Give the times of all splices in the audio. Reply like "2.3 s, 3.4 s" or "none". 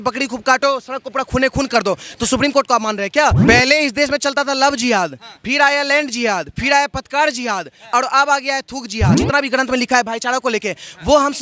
3.4 s, 9.2 s